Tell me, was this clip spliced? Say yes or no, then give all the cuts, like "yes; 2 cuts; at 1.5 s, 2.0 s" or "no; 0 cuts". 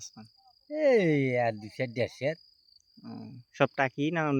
no; 0 cuts